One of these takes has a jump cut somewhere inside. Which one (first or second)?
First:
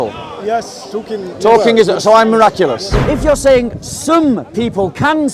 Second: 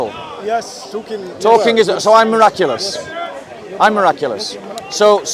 first